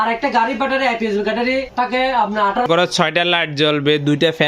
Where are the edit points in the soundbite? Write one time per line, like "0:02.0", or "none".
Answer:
0:01.7
0:02.6